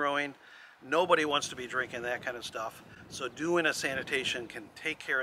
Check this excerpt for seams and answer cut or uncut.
uncut